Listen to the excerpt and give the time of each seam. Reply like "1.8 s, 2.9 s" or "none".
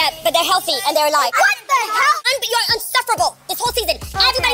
2.2 s